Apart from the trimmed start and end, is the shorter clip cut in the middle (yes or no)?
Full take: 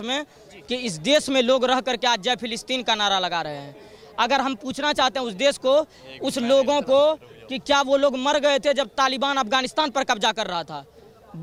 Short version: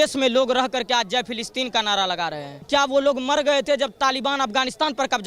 yes